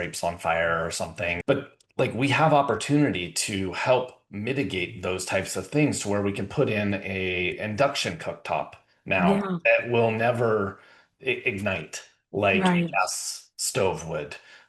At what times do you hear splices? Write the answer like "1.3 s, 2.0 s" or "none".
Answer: 1.4 s